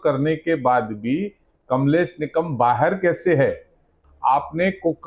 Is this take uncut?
no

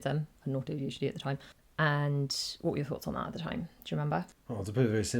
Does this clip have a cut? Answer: yes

